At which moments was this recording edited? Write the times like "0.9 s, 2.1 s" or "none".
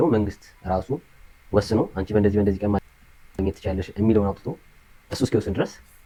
none